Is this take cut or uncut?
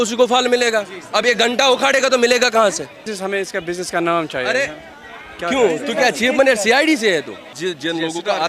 cut